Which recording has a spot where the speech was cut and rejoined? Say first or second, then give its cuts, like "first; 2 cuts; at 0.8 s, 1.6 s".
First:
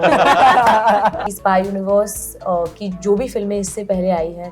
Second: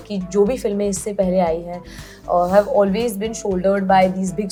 first; 1 cut; at 1.2 s